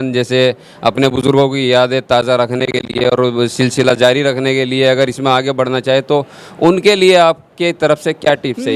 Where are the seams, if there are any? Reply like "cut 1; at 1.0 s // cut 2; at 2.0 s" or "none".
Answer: none